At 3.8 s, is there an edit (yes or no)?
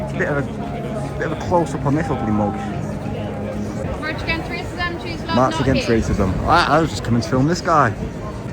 yes